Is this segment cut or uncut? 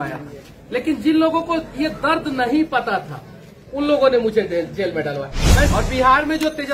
cut